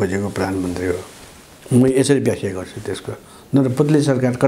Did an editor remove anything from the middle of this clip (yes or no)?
no